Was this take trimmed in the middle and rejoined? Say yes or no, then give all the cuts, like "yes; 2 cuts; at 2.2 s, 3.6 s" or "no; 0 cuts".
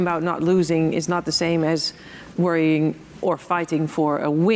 no; 0 cuts